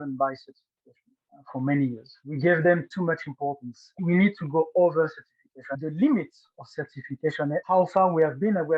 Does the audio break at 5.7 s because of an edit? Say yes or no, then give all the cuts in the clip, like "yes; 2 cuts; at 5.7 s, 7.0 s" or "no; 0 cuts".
yes; 2 cuts; at 4.0 s, 5.7 s